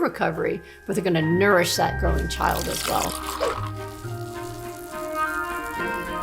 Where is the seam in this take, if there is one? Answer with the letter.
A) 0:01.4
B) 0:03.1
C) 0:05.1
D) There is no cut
B